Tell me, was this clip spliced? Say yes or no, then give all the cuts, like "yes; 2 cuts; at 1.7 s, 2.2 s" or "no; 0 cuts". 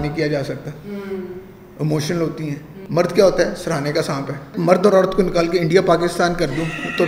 yes; 2 cuts; at 2.7 s, 4.5 s